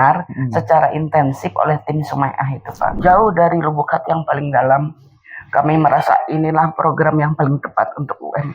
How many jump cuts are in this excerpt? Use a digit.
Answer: 1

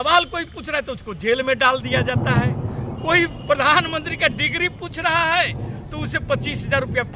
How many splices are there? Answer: 0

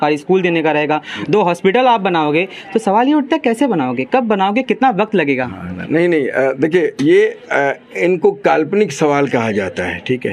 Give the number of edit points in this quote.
0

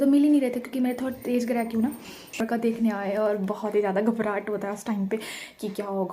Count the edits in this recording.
1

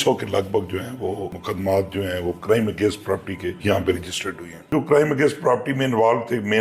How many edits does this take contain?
4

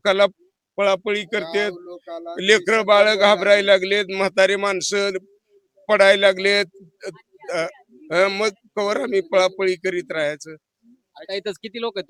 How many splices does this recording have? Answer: 0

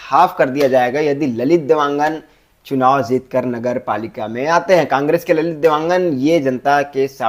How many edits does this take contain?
0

